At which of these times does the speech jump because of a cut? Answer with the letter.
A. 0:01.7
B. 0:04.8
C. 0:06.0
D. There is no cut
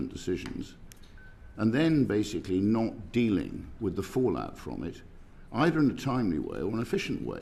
D